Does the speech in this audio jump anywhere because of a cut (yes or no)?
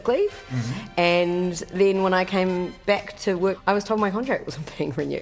yes